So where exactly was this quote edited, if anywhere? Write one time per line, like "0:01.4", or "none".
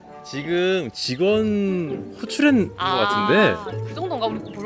none